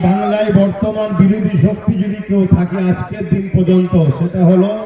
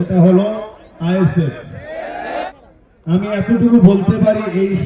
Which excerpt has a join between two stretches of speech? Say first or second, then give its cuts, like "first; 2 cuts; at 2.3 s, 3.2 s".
second; 1 cut; at 2.5 s